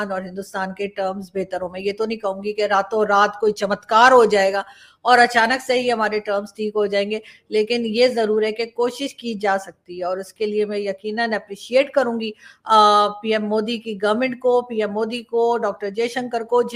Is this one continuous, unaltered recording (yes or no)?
yes